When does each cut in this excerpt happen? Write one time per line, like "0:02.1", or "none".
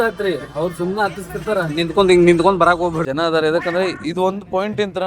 0:03.0